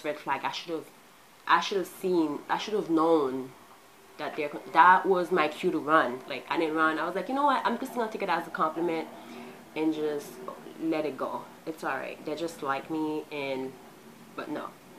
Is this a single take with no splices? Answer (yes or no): yes